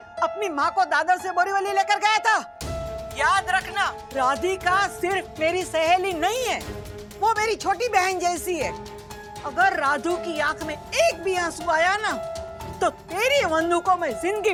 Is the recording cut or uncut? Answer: uncut